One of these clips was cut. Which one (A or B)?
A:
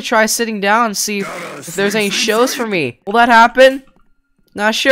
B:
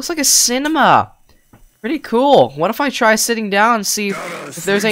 A